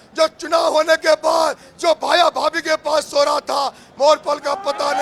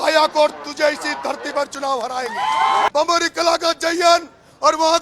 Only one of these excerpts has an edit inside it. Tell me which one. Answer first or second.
second